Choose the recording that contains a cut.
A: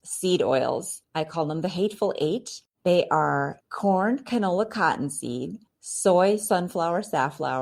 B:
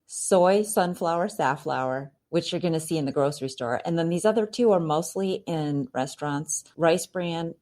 B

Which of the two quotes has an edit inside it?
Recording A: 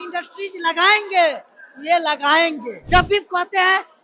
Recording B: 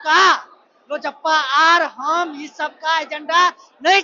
A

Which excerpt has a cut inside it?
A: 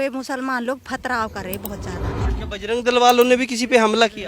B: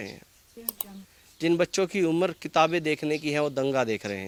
A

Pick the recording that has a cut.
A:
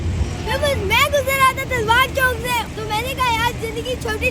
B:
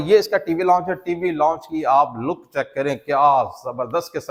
A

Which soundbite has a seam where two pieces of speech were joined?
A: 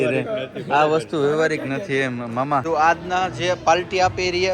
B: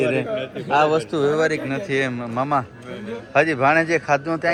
A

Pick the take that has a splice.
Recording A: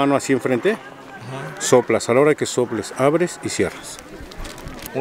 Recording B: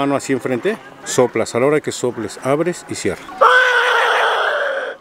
B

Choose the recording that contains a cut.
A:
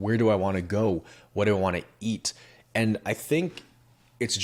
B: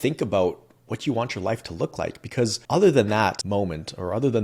B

